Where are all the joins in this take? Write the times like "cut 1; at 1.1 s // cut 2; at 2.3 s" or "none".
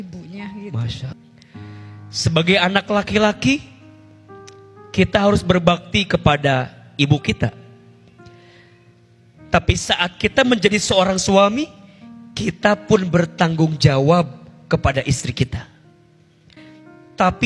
cut 1; at 1.2 s // cut 2; at 16.6 s